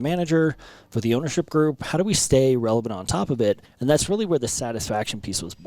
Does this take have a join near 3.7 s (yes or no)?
yes